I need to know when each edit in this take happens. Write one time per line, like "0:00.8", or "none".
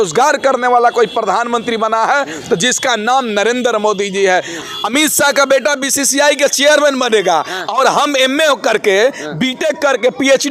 0:04.6